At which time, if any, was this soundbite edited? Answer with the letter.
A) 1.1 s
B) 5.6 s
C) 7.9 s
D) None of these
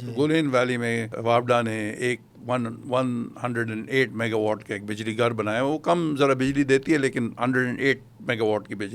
A